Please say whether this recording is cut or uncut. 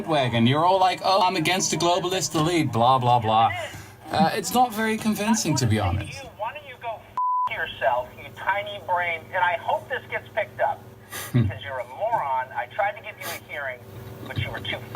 cut